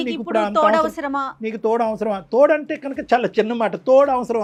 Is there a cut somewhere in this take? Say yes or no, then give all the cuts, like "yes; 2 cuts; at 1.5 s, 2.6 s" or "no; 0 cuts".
no; 0 cuts